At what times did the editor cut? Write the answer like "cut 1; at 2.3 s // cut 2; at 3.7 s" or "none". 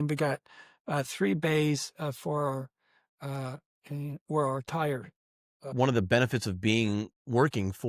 cut 1; at 5.7 s